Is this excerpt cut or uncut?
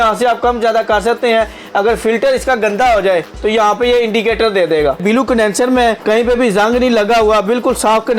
cut